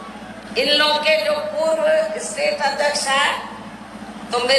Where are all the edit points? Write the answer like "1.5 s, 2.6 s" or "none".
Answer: none